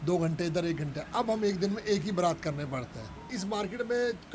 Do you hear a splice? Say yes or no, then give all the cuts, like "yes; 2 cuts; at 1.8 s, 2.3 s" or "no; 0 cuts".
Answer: yes; 1 cut; at 3.3 s